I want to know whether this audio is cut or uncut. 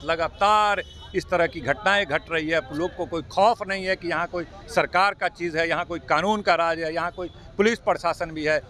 uncut